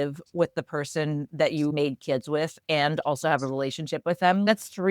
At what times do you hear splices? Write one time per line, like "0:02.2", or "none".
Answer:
0:01.7